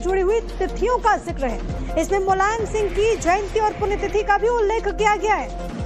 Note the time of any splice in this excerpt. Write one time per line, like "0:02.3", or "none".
none